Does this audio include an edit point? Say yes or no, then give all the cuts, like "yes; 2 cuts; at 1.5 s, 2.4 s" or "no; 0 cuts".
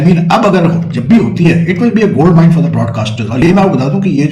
no; 0 cuts